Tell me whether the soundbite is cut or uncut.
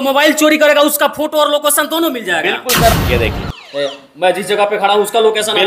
cut